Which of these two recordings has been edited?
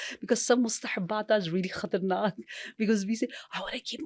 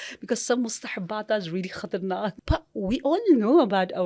second; 1 cut; at 2.3 s

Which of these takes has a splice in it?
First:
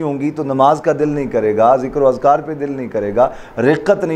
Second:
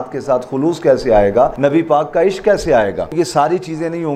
second; 2 cuts; at 1.5 s, 3.1 s

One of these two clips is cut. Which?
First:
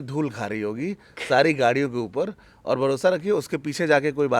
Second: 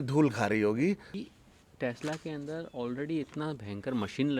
second; 1 cut; at 1.1 s

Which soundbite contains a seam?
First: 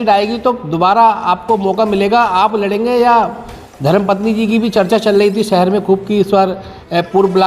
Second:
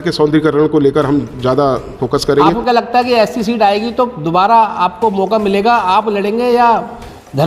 second; 1 cut; at 2.5 s

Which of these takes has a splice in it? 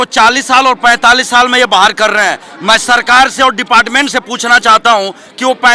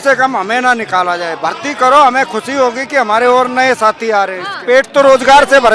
second; 1 cut; at 4.5 s

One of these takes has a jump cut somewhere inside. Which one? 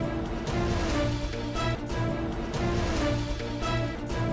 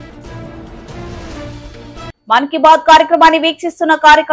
second; 1 cut; at 2.1 s

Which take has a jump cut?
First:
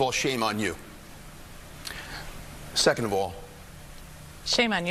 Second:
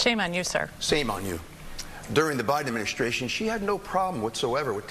second; 1 cut; at 1.7 s

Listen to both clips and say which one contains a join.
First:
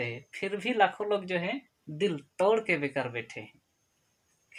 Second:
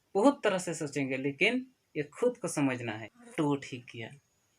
second; 1 cut; at 3.1 s

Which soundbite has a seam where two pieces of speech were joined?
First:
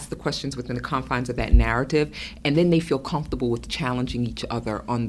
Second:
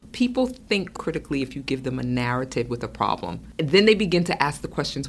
second; 2 cuts; at 1.0 s, 3.4 s

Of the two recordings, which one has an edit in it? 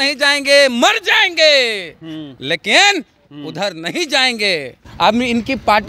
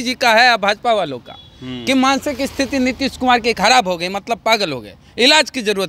first; 1 cut; at 4.8 s

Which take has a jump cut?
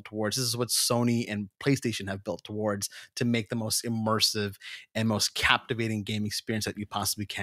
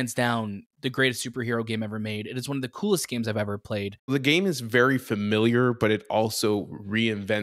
second; 1 cut; at 4.1 s

